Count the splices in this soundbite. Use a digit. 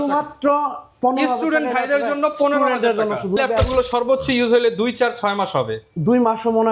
1